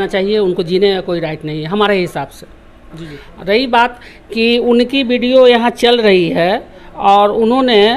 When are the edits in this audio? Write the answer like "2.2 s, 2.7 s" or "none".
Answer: none